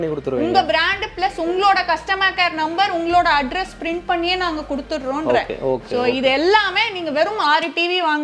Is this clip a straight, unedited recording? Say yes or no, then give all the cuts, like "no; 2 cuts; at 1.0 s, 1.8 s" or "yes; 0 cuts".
yes; 0 cuts